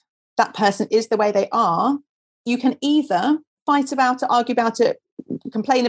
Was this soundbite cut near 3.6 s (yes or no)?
yes